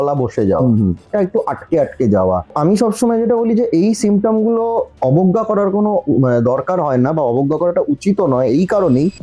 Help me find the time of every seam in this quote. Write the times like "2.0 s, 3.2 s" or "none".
1.0 s, 2.5 s